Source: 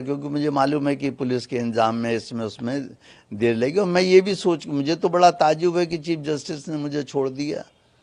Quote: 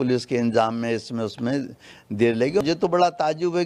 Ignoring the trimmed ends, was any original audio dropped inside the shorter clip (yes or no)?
yes